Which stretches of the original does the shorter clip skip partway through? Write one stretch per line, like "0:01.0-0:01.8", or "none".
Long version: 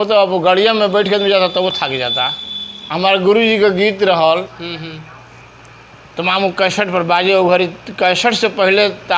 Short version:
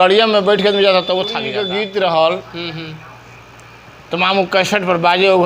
0:02.1-0:03.6